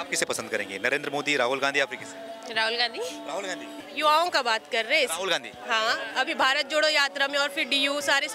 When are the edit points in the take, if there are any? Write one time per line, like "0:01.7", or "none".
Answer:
0:03.7